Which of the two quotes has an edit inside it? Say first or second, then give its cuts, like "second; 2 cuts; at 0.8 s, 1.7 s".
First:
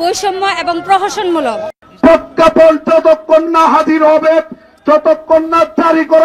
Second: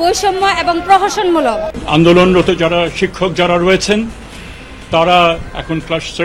second; 1 cut; at 1.7 s